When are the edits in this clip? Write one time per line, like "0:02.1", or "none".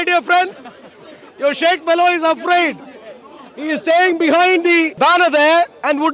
0:04.9